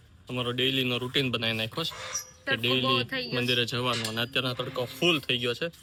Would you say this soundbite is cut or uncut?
uncut